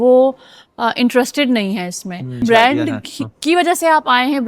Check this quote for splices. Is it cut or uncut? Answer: cut